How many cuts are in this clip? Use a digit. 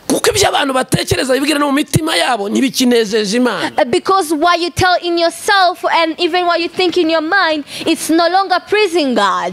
0